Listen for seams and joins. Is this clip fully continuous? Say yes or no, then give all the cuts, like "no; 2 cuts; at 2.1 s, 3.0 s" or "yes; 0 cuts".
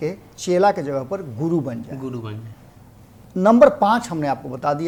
yes; 0 cuts